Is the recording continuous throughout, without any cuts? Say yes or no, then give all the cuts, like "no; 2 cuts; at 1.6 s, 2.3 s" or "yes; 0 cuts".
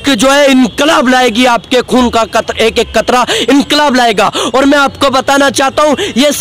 yes; 0 cuts